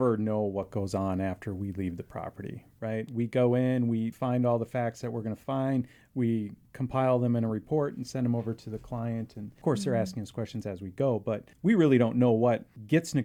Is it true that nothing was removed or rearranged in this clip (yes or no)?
yes